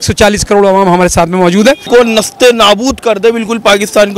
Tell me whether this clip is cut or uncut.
cut